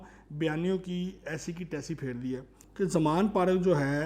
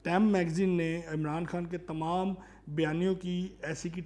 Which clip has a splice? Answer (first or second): first